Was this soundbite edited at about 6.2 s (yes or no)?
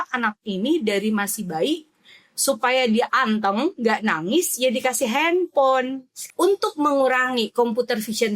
yes